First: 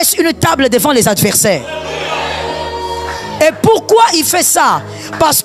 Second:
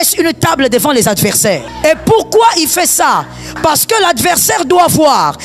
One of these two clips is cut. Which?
second; 1 cut; at 1.7 s

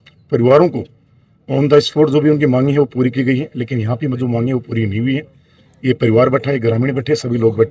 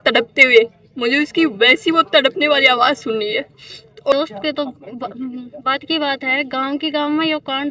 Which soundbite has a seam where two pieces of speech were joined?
second; 1 cut; at 4.1 s

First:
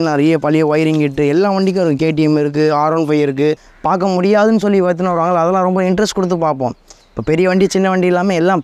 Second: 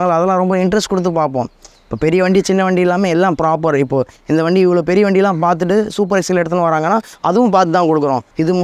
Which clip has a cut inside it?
first; 1 cut; at 3.7 s

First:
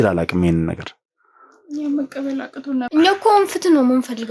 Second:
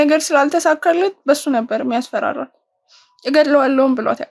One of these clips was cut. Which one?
first; 1 cut; at 2.9 s

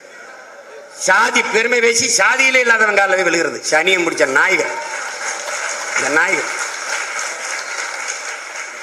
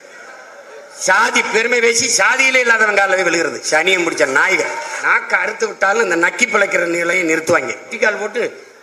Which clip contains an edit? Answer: second; 2 cuts; at 5.0 s, 7.9 s

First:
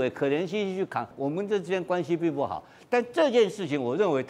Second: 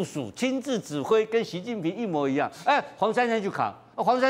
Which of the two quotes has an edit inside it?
first; 1 cut; at 1.1 s

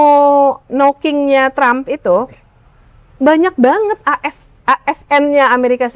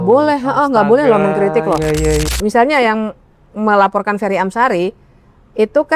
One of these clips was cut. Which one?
second; 1 cut; at 2.3 s

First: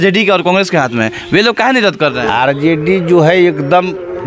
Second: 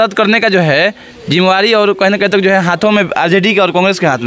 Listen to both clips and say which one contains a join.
first; 1 cut; at 2.2 s

